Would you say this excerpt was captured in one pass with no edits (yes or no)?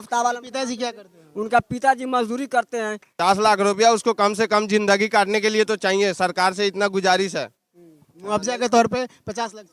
no